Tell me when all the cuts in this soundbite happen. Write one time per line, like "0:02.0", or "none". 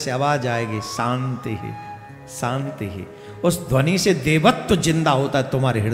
none